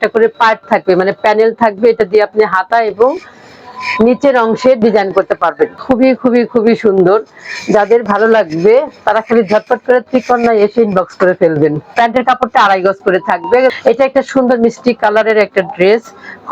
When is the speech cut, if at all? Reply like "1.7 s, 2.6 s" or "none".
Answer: 5.8 s, 11.9 s, 13.8 s